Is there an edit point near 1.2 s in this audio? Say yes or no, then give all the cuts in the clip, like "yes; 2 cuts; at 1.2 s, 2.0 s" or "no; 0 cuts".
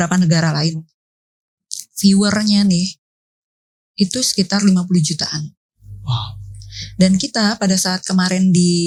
no; 0 cuts